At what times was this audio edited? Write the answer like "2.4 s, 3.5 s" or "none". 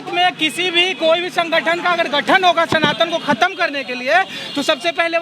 none